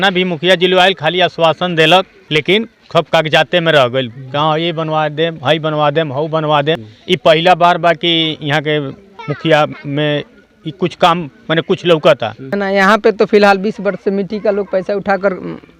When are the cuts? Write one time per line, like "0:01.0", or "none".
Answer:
0:02.2
0:06.9
0:09.1
0:12.4